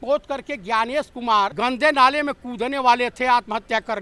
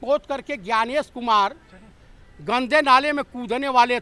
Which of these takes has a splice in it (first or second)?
first